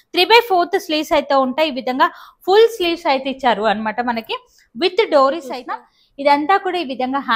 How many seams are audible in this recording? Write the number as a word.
one